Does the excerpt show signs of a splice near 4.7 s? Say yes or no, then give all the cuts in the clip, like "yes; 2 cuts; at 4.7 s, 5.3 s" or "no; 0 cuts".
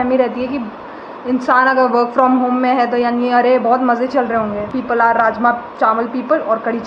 yes; 1 cut; at 4.7 s